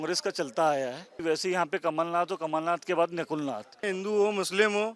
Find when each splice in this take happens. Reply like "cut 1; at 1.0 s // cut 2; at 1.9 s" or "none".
cut 1; at 1.2 s // cut 2; at 3.9 s